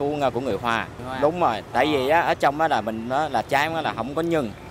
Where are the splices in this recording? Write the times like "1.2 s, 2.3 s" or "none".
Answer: 1.0 s